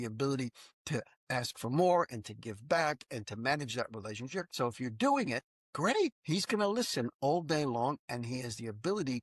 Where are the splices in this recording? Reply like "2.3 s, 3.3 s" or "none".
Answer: 4.5 s, 6.0 s